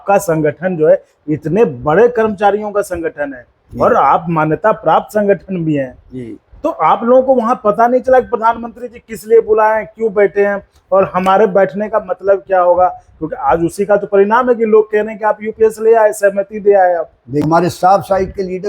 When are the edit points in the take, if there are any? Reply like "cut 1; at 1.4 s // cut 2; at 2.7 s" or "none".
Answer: cut 1; at 17.5 s